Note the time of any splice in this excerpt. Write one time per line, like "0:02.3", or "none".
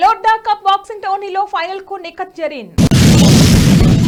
none